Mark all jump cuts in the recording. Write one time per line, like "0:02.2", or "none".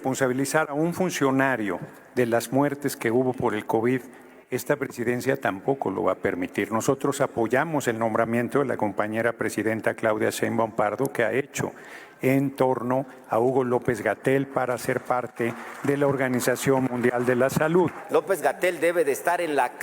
0:18.0